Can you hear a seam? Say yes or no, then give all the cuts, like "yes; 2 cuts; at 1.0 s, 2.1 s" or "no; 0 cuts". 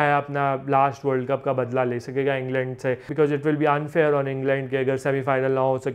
yes; 1 cut; at 3.1 s